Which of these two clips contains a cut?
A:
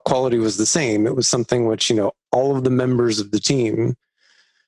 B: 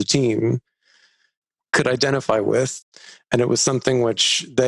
B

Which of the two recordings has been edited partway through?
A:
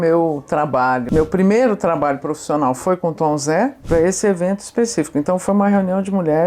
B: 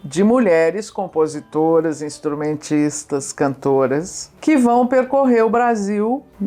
A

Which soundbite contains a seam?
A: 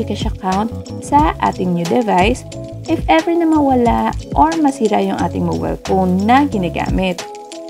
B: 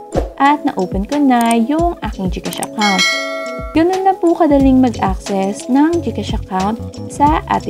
B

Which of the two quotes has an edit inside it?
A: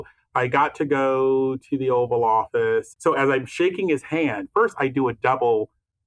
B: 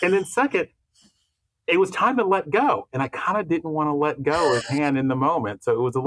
A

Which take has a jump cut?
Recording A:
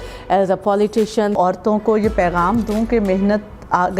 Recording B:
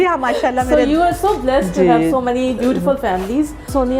A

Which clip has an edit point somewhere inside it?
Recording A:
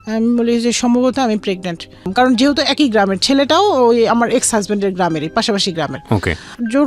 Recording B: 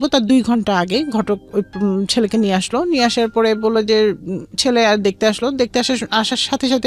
A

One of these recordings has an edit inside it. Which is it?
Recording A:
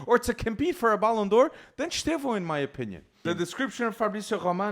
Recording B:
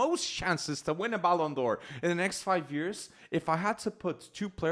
A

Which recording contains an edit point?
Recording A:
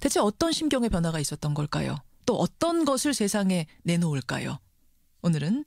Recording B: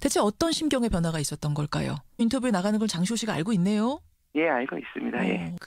A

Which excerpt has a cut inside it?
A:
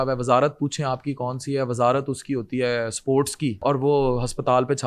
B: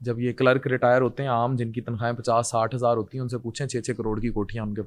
A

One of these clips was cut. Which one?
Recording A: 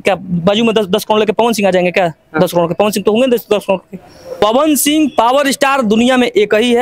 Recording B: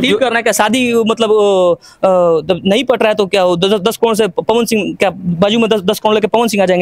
A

